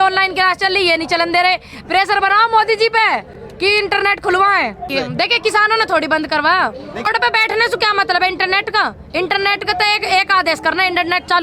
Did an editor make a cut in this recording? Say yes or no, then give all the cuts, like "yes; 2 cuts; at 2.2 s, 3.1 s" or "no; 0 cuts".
yes; 2 cuts; at 4.9 s, 7.1 s